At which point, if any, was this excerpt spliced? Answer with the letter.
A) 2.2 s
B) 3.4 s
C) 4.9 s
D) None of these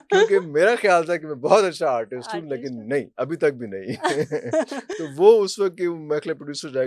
D